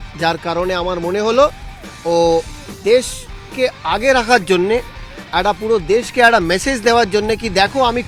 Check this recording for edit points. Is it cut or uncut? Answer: uncut